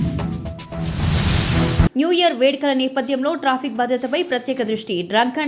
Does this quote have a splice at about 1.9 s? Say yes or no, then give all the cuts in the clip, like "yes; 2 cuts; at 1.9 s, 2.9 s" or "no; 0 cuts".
yes; 1 cut; at 1.9 s